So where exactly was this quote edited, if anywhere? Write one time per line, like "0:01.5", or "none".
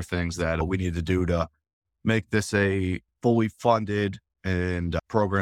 none